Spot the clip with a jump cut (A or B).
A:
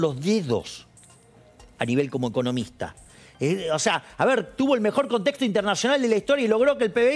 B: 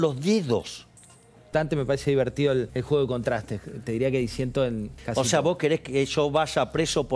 B